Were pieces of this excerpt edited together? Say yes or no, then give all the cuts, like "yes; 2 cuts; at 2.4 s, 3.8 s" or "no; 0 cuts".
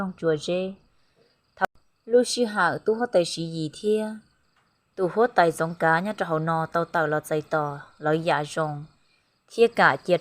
yes; 1 cut; at 1.7 s